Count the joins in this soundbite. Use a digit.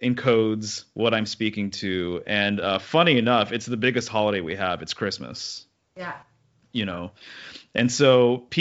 0